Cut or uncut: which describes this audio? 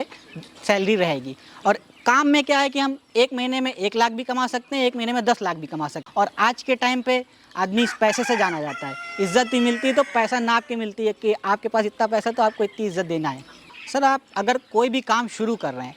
cut